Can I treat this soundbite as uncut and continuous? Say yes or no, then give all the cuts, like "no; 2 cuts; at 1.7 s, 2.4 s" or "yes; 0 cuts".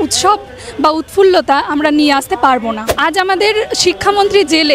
no; 1 cut; at 2.9 s